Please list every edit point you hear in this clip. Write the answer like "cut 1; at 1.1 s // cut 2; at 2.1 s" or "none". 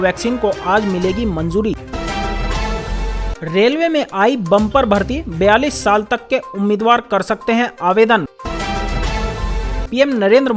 cut 1; at 1.8 s // cut 2; at 3.2 s // cut 3; at 8.3 s